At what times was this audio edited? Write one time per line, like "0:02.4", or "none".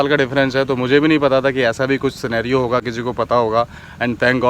none